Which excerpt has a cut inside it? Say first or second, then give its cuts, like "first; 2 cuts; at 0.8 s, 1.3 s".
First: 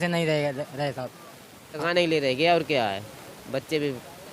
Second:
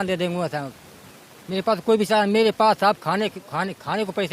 first; 1 cut; at 1.8 s